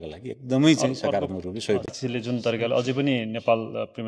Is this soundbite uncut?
no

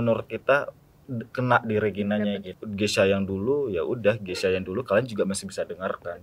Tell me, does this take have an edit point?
yes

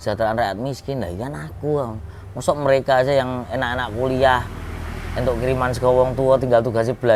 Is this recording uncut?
yes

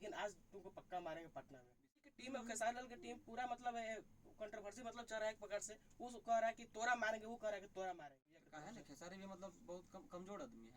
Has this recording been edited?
yes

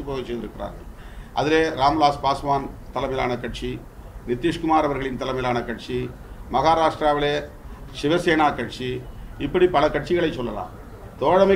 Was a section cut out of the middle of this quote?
no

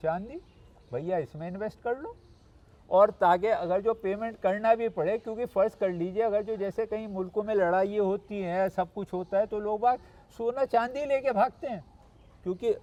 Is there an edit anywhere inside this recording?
no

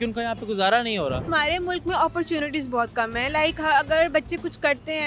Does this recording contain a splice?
yes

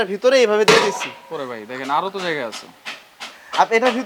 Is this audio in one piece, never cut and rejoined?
yes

